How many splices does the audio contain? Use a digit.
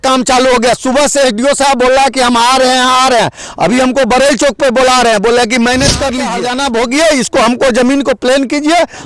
1